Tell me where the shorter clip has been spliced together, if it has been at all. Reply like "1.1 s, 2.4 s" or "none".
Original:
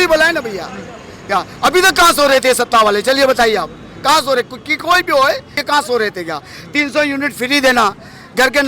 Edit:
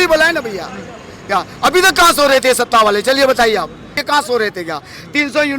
3.9 s